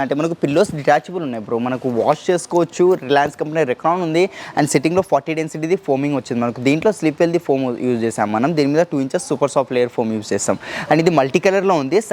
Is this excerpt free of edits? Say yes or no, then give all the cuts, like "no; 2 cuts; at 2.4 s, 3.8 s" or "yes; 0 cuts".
yes; 0 cuts